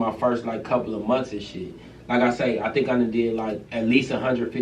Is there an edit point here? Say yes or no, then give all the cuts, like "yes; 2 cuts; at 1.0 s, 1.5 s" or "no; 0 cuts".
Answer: yes; 1 cut; at 3.6 s